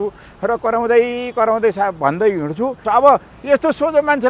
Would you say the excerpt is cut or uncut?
cut